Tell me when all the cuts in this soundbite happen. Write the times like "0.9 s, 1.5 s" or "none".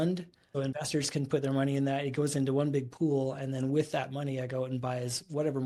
none

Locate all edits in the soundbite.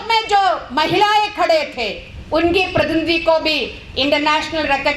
none

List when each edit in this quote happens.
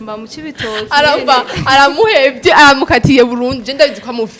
none

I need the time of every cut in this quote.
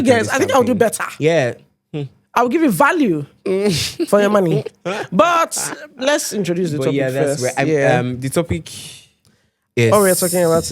none

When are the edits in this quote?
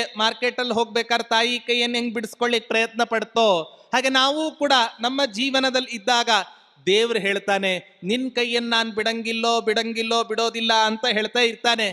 none

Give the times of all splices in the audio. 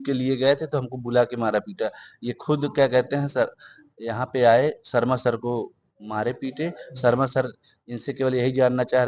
none

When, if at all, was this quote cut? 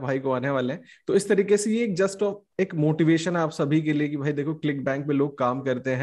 none

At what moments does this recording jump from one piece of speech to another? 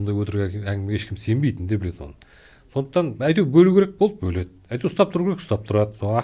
none

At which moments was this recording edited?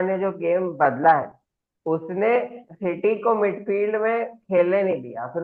none

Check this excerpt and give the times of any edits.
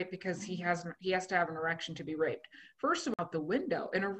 3.1 s

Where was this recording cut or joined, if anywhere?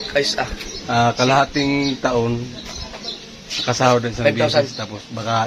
none

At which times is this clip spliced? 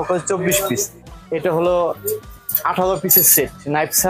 1.0 s

